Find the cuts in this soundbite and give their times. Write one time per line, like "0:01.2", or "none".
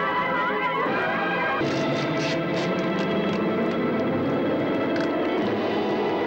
0:01.6